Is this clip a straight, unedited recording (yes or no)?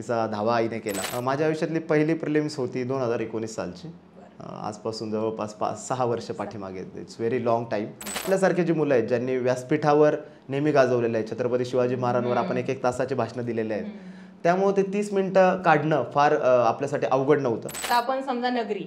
no